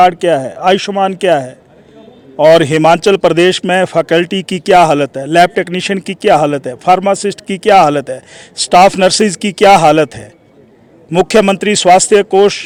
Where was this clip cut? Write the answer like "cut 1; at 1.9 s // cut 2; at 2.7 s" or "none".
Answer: none